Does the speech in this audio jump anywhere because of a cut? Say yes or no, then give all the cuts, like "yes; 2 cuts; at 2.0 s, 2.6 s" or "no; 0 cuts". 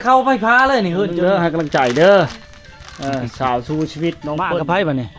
yes; 2 cuts; at 1.2 s, 4.5 s